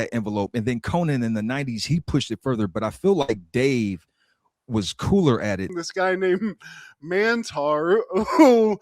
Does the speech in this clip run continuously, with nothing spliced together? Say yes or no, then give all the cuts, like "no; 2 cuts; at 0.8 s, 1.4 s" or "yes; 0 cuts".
no; 1 cut; at 5.7 s